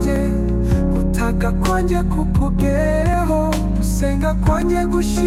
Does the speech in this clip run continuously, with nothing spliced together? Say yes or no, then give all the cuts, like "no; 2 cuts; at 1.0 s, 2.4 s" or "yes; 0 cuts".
yes; 0 cuts